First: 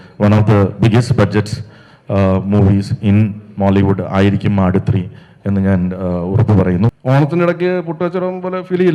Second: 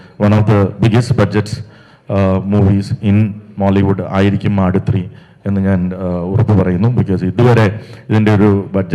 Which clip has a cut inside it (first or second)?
first